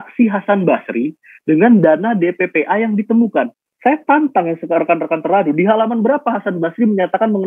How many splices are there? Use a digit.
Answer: 1